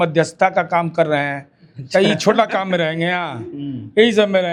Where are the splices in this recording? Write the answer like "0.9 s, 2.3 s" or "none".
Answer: none